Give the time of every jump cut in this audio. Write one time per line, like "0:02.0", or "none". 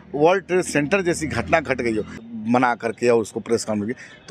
0:02.2